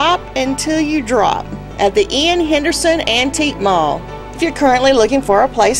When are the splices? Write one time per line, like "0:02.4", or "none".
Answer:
none